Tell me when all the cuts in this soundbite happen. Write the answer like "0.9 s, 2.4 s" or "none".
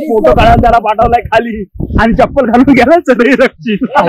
none